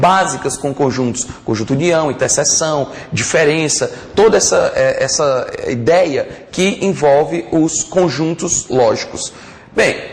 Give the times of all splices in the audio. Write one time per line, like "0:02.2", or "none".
none